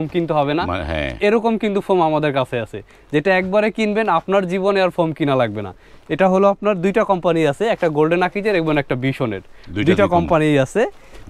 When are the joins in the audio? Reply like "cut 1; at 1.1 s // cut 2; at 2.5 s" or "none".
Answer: none